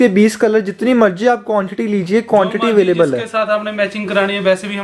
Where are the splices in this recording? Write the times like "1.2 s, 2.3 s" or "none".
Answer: none